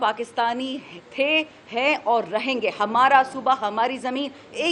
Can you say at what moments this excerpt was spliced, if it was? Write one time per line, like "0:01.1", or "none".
none